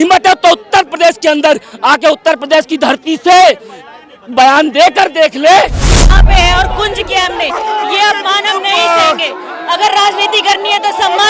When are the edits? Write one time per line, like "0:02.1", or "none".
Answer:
0:06.1